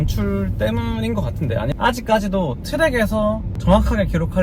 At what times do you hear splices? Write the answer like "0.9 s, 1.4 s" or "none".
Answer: 1.7 s, 3.5 s